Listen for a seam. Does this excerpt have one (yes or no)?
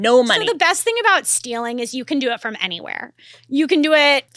no